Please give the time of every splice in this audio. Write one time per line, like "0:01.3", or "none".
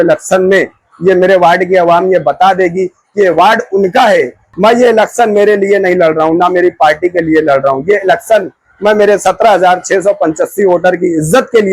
0:04.4